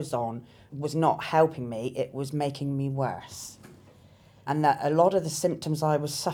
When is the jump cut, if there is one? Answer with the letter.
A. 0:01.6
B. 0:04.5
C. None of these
B